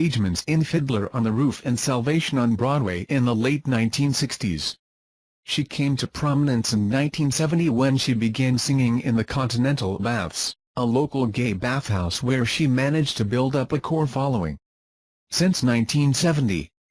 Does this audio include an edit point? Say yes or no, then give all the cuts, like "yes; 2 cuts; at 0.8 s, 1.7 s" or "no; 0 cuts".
no; 0 cuts